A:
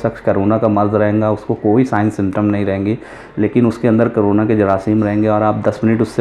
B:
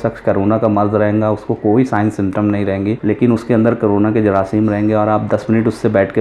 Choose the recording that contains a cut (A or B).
B